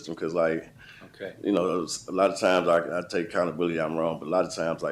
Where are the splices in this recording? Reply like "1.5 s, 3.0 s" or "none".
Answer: 3.2 s